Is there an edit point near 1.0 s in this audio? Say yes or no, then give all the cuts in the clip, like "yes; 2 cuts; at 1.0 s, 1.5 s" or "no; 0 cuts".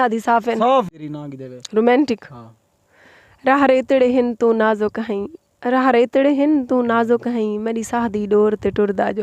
yes; 1 cut; at 1.0 s